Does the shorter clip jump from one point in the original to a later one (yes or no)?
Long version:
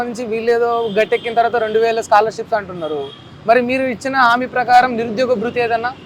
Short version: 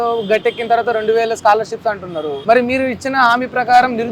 yes